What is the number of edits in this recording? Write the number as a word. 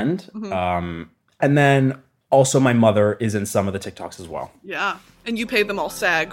one